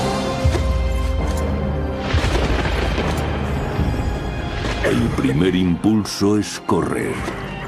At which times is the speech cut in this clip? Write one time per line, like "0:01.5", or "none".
none